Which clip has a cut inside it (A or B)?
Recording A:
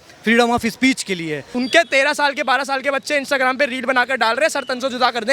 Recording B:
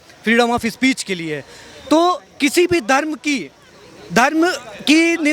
A